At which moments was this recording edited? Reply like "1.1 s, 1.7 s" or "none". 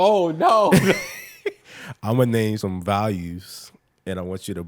2.6 s